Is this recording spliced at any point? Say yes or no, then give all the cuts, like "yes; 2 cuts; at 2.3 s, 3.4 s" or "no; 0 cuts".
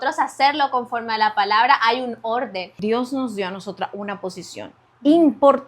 yes; 1 cut; at 2.7 s